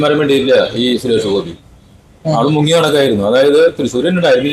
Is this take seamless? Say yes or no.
yes